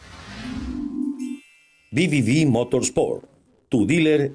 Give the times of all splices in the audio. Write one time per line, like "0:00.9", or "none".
0:01.4